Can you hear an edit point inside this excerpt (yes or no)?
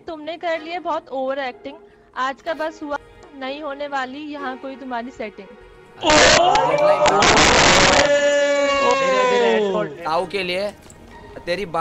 yes